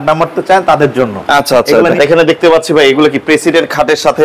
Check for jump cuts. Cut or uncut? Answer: cut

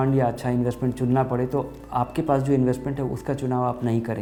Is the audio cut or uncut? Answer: uncut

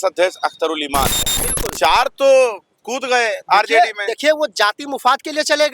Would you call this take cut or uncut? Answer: cut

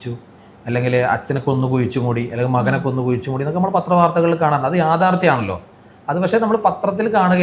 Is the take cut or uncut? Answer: uncut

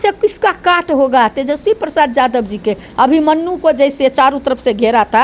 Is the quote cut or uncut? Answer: uncut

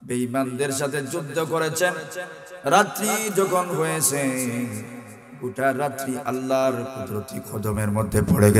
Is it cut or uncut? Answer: uncut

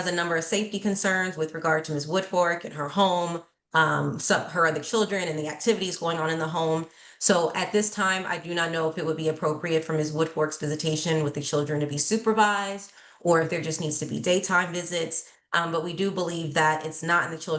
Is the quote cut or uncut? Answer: uncut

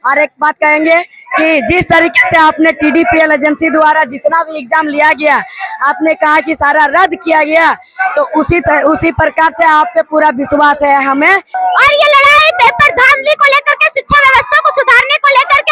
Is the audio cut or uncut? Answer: cut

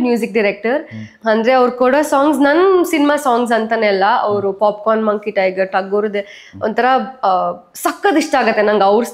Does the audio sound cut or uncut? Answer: uncut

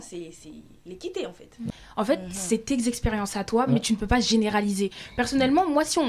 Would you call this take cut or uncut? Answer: cut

